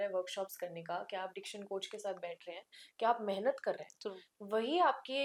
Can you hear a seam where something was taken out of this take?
no; 0 cuts

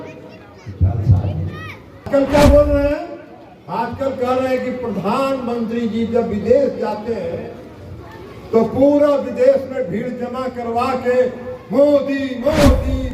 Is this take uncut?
no; 1 cut; at 2.1 s

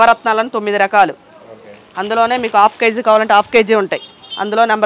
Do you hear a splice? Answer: no; 0 cuts

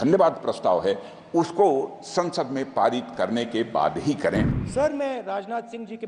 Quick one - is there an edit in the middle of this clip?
yes; 1 cut; at 4.6 s

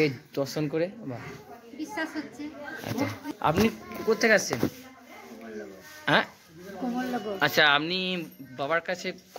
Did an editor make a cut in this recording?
yes; 1 cut; at 3.2 s

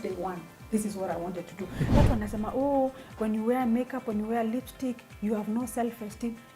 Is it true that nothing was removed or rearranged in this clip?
no; 1 cut; at 1.9 s

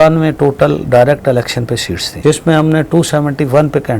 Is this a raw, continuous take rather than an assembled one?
no; 1 cut; at 2.1 s

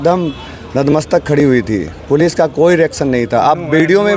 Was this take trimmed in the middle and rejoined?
no; 0 cuts

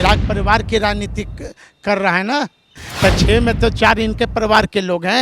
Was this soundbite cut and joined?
yes; 1 cut; at 2.8 s

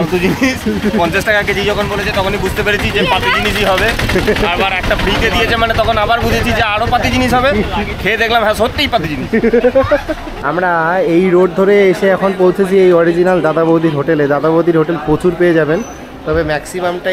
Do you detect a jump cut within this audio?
yes; 1 cut; at 10.3 s

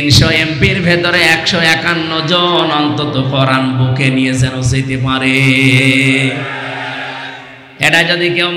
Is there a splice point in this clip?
no; 0 cuts

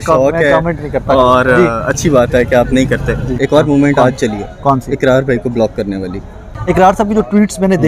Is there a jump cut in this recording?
yes; 2 cuts; at 3.3 s, 6.5 s

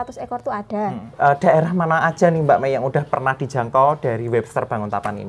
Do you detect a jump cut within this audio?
yes; 1 cut; at 1.0 s

